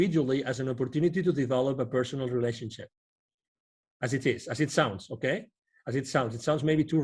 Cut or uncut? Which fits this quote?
uncut